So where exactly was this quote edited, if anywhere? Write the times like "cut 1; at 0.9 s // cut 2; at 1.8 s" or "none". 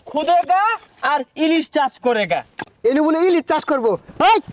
cut 1; at 2.7 s